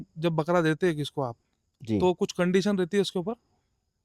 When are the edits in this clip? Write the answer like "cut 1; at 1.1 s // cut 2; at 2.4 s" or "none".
none